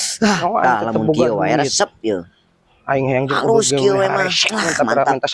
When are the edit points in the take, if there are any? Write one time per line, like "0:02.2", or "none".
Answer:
none